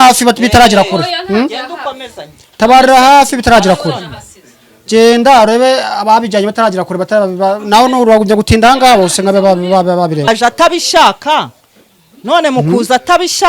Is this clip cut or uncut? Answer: cut